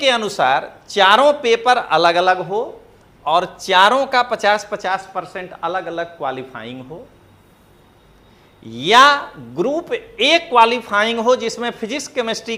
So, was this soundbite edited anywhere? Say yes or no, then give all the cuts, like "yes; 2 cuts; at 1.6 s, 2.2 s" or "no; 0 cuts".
no; 0 cuts